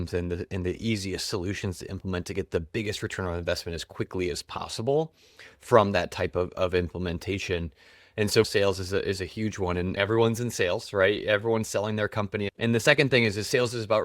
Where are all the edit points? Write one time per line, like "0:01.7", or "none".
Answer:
0:08.4
0:10.0
0:12.5